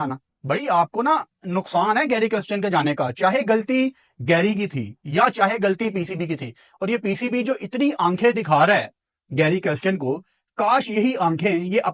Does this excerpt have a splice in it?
no; 0 cuts

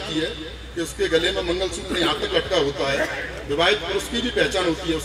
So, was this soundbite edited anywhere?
no; 0 cuts

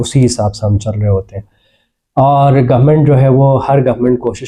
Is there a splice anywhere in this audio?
no; 0 cuts

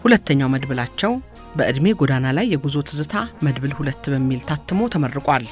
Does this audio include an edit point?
no; 0 cuts

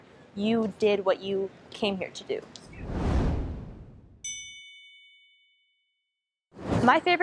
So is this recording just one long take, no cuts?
yes; 0 cuts

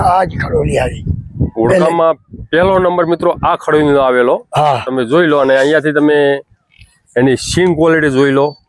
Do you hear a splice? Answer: no; 0 cuts

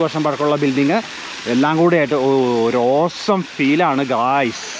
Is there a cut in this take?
no; 0 cuts

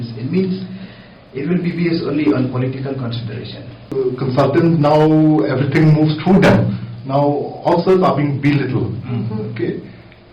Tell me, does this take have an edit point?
yes; 1 cut; at 3.9 s

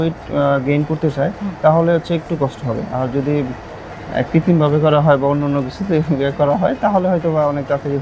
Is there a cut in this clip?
no; 0 cuts

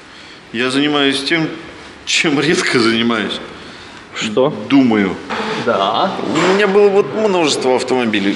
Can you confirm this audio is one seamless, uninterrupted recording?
no; 1 cut; at 5.3 s

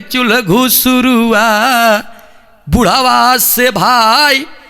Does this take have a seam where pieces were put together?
no; 0 cuts

